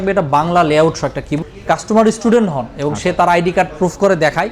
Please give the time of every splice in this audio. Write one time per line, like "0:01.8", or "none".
0:01.3

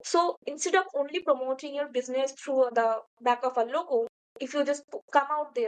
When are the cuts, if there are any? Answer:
0:02.7

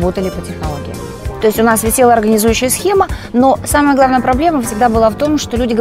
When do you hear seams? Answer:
0:01.2

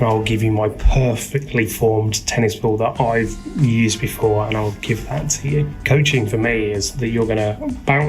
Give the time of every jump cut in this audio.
0:05.8

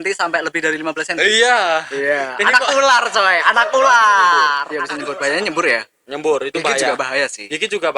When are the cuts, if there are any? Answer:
0:04.7

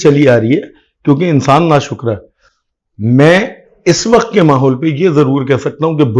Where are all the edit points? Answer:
none

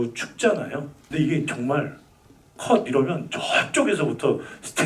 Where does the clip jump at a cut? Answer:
0:01.0

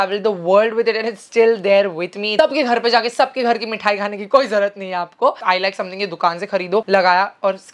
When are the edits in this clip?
0:02.2
0:05.4

